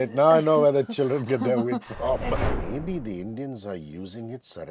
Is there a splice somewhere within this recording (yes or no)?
yes